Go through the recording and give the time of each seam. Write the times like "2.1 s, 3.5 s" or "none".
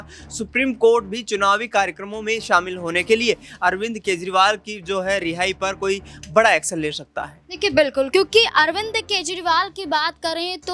none